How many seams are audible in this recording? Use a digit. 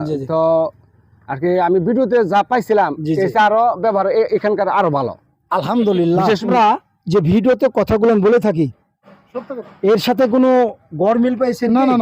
1